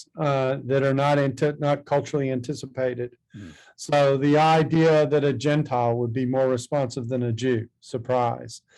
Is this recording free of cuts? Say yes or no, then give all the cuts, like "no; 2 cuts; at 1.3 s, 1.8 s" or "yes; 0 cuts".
yes; 0 cuts